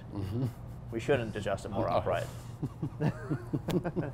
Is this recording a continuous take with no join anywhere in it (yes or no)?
no